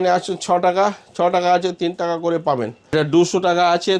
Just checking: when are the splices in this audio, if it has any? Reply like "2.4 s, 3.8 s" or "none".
2.9 s